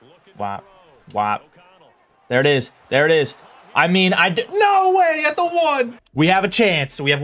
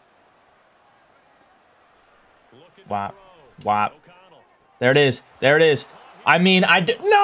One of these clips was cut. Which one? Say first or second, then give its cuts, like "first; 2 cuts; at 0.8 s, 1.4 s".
first; 1 cut; at 6.0 s